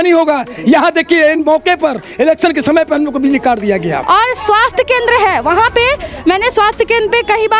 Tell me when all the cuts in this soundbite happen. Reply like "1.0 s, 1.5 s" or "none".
4.0 s